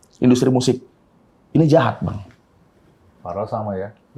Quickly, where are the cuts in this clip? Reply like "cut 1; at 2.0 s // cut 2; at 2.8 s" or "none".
none